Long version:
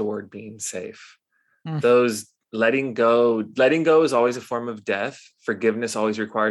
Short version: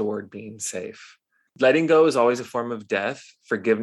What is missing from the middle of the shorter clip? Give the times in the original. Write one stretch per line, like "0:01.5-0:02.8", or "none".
0:01.5-0:03.5